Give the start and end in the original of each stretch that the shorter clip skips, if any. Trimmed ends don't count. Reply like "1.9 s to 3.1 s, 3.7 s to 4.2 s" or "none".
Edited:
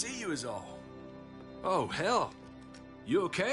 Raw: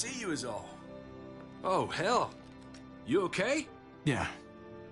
none